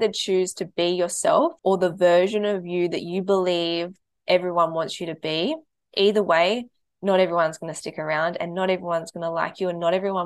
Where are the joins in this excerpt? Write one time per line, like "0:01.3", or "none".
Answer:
0:01.6